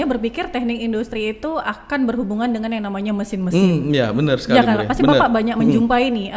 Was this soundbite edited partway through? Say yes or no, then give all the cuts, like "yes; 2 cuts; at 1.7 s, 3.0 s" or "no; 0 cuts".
no; 0 cuts